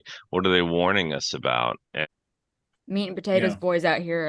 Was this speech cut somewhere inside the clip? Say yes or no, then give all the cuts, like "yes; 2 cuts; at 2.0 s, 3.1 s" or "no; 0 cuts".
yes; 1 cut; at 1.9 s